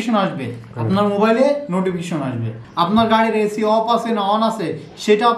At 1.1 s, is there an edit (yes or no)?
no